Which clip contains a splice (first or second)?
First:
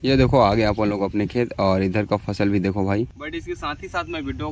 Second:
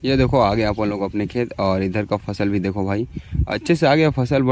first